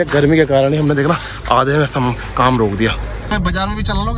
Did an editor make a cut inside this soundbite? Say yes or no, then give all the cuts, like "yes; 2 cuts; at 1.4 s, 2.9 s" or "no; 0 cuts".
yes; 1 cut; at 3.3 s